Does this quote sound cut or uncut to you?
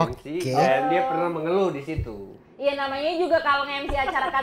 uncut